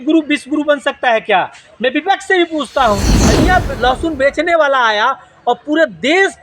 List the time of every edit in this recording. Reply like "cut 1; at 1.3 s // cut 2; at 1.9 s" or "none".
cut 1; at 3.3 s